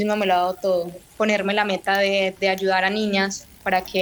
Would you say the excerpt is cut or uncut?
cut